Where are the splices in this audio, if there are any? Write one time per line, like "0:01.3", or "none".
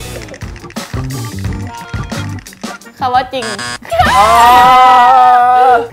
0:03.9